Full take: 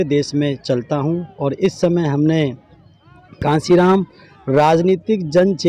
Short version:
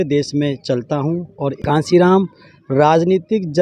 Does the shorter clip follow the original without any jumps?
no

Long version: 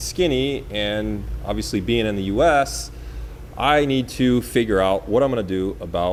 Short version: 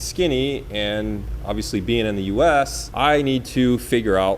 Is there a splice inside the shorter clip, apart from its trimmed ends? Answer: yes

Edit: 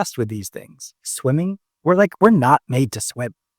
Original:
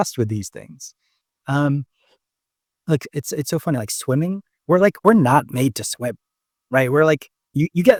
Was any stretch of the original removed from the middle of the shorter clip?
yes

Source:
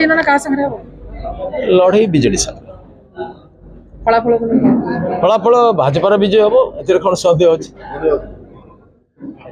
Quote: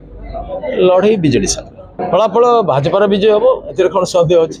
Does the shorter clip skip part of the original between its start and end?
yes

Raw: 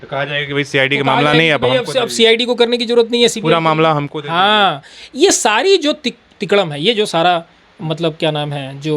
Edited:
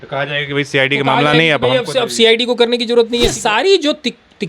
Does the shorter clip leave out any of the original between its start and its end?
yes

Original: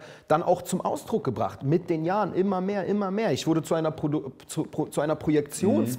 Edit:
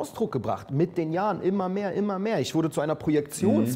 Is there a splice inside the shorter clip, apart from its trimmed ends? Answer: yes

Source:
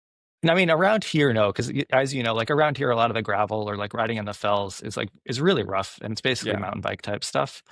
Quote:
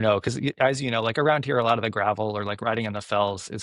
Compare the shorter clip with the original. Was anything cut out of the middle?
no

